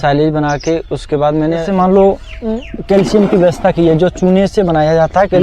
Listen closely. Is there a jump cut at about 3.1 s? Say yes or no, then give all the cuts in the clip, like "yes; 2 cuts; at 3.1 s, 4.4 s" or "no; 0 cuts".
no; 1 cut; at 1.7 s